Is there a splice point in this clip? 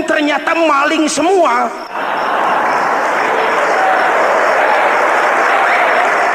yes; 1 cut; at 1.9 s

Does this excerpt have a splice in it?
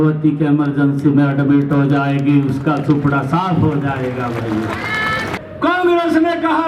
no; 0 cuts

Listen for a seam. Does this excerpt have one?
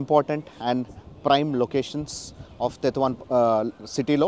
no; 0 cuts

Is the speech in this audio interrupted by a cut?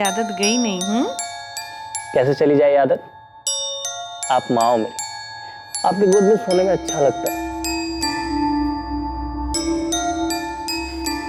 no; 0 cuts

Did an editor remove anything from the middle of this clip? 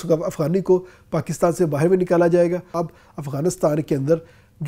yes; 1 cut; at 2.7 s

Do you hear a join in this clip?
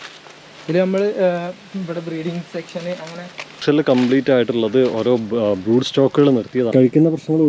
yes; 1 cut; at 3.6 s

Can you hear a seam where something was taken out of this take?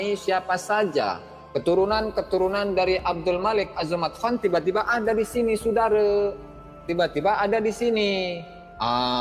no; 0 cuts

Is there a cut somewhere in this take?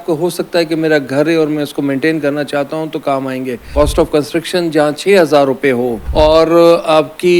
yes; 2 cuts; at 3.7 s, 6.0 s

